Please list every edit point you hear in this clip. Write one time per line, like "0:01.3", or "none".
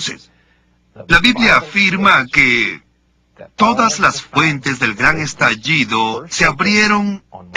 0:01.4